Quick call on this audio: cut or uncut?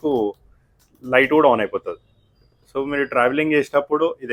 uncut